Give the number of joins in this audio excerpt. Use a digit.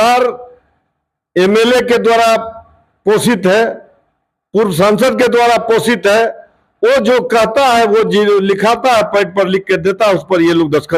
0